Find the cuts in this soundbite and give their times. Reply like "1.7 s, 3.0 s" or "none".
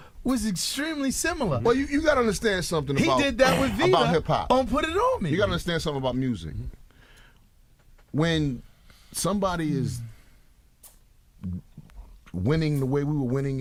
none